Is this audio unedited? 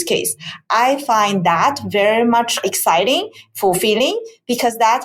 no; 1 cut; at 2.6 s

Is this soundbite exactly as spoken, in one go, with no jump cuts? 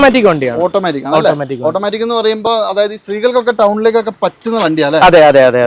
yes; 0 cuts

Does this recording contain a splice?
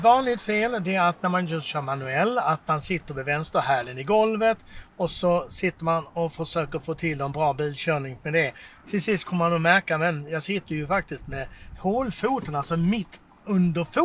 no; 0 cuts

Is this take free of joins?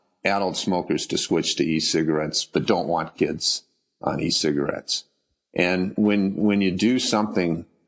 yes; 0 cuts

